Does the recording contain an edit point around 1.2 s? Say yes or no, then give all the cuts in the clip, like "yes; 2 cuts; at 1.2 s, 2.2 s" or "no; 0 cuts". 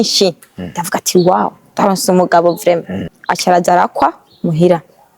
no; 1 cut; at 3.0 s